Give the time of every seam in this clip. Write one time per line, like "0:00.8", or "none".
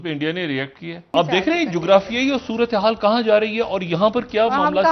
0:01.1